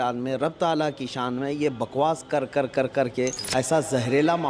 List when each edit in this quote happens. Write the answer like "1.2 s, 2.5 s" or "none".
3.4 s